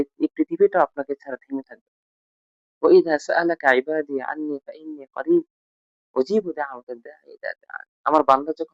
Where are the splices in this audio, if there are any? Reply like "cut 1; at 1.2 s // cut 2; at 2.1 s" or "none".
cut 1; at 2.4 s

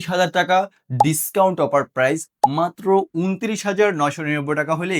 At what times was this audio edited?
none

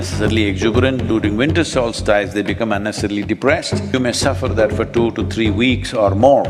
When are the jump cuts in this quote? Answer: cut 1; at 3.9 s

